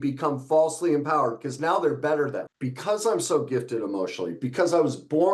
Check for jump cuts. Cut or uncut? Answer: cut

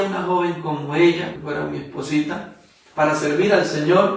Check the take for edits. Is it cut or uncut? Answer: cut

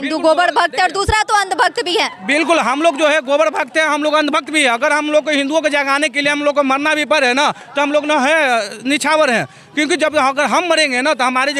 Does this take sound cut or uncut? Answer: uncut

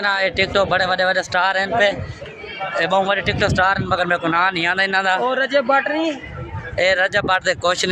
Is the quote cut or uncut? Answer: uncut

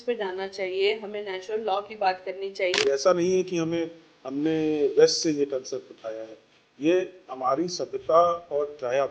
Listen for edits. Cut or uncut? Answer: cut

